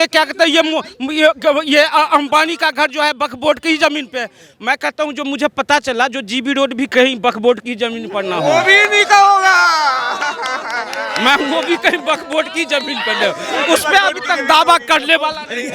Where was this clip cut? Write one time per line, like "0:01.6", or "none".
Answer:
none